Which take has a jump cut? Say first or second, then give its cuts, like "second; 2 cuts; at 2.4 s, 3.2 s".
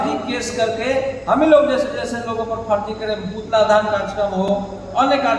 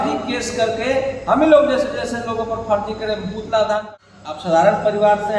second; 1 cut; at 3.9 s